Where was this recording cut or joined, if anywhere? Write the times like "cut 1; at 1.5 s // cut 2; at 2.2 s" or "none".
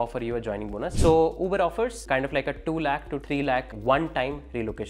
cut 1; at 0.9 s // cut 2; at 2.0 s // cut 3; at 3.4 s